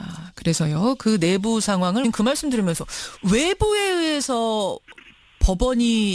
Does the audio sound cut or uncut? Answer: uncut